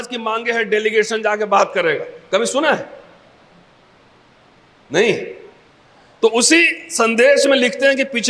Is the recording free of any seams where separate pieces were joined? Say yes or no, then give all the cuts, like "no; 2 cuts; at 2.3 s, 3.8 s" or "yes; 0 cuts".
yes; 0 cuts